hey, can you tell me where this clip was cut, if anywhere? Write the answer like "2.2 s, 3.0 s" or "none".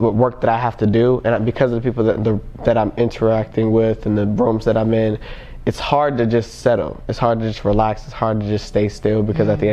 none